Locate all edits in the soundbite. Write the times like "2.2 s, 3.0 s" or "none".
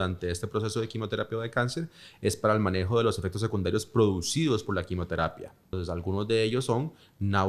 5.8 s